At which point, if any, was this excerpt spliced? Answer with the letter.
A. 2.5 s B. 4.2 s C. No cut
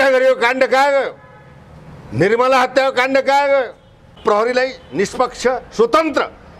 B